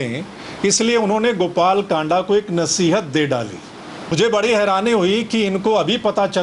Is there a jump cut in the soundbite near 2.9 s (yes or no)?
no